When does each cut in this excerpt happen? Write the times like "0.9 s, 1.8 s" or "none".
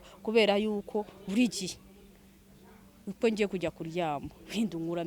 none